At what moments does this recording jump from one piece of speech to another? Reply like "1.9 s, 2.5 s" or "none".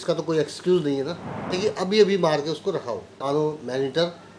1.5 s, 3.2 s